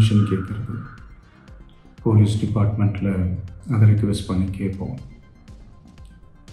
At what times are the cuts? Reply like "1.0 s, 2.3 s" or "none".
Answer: 5.4 s